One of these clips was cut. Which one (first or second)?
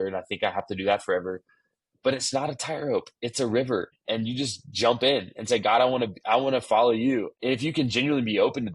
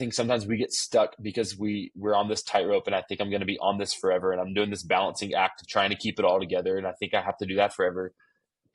first